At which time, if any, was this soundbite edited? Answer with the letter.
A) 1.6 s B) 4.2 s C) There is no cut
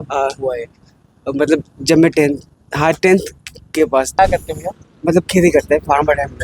B